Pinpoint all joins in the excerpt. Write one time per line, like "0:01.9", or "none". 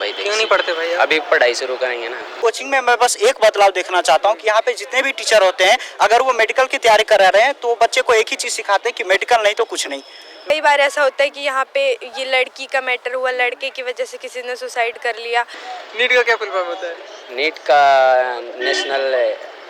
0:02.3
0:10.4
0:15.6